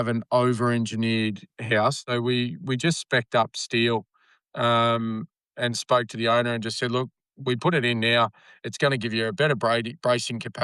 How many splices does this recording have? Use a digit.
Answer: 1